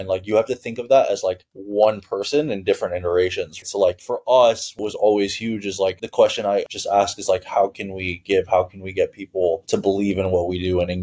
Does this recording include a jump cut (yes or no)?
yes